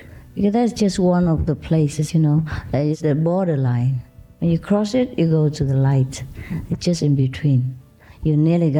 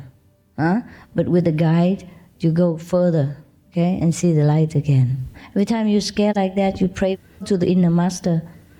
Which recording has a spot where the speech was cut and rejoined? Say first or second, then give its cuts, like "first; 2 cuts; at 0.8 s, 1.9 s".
second; 1 cut; at 5.4 s